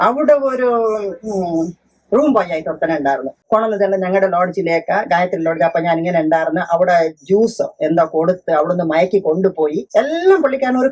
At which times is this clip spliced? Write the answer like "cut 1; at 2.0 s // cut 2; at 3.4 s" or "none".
cut 1; at 3.4 s // cut 2; at 9.8 s